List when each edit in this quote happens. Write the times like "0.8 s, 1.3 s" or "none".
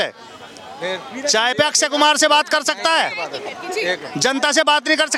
none